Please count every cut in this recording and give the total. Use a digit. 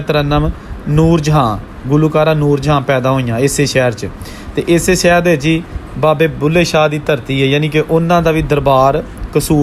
0